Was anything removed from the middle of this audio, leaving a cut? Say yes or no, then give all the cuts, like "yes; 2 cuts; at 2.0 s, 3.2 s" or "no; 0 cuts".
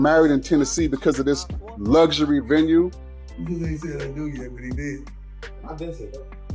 yes; 1 cut; at 3.0 s